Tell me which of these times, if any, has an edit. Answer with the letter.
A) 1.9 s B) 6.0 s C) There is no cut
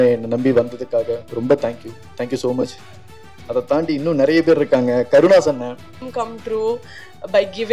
B